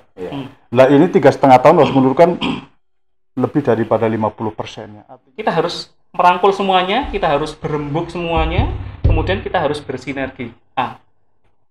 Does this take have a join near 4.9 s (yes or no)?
yes